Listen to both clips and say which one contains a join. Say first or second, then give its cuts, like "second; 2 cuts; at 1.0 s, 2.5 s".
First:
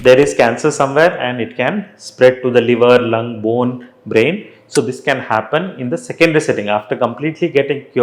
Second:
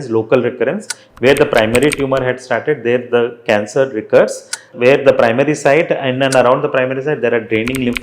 second; 1 cut; at 4.7 s